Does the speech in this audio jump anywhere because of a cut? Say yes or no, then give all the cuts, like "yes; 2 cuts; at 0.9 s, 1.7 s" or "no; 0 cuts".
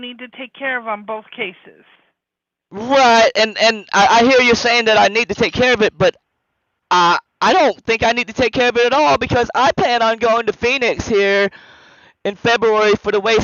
no; 0 cuts